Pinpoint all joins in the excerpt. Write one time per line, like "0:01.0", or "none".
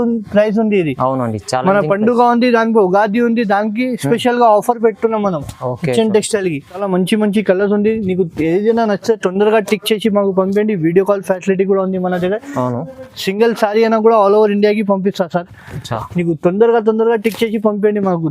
0:06.8